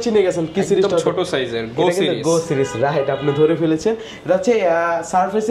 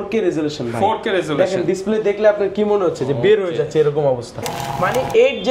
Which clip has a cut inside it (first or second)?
second